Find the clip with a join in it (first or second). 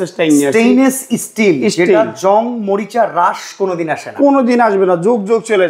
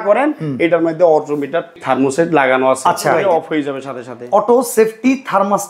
second